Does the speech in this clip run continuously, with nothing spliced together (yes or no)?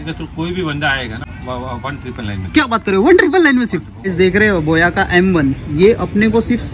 no